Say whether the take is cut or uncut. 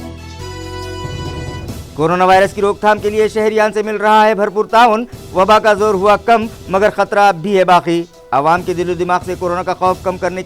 cut